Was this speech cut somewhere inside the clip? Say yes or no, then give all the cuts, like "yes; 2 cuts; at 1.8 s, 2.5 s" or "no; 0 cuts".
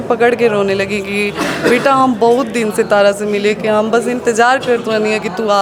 no; 0 cuts